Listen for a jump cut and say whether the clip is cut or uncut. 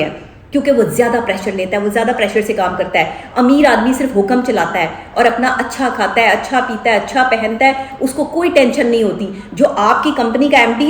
uncut